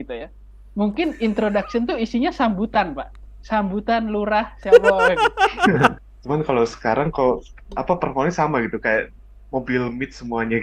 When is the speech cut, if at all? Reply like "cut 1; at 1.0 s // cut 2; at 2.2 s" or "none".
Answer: cut 1; at 6.0 s